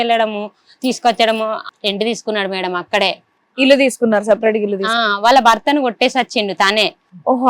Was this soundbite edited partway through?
yes; 1 cut; at 1.6 s

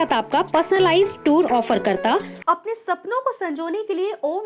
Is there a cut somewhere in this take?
yes; 1 cut; at 2.3 s

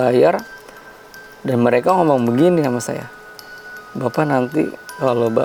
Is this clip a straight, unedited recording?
yes; 0 cuts

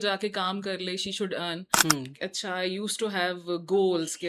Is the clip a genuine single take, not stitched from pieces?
no; 1 cut; at 1.7 s

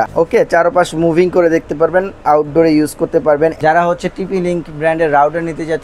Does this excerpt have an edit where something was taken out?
yes; 1 cut; at 3.6 s

